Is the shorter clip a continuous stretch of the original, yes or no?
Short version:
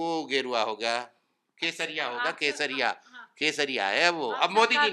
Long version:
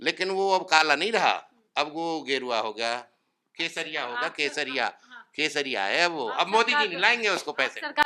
yes